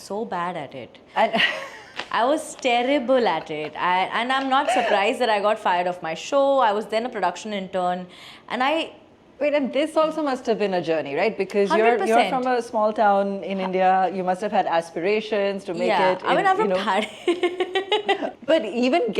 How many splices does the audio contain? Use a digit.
0